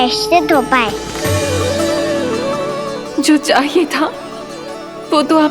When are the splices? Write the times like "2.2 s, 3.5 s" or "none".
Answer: none